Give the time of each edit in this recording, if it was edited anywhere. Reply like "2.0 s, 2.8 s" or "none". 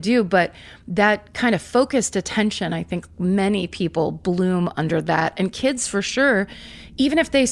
none

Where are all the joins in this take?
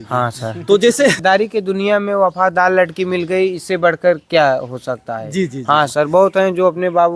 1.2 s

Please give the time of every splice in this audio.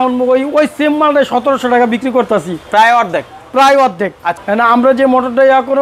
none

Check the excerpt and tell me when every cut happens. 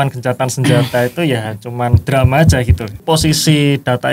3.0 s

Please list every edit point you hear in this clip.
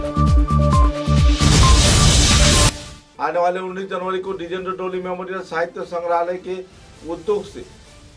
2.7 s

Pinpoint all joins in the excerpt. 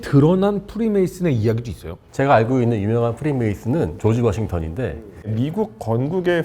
3.9 s, 5.3 s

